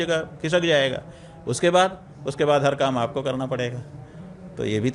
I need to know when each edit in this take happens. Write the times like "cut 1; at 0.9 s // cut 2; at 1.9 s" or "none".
none